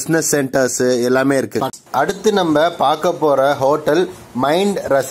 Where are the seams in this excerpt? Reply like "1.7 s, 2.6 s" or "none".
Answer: 1.7 s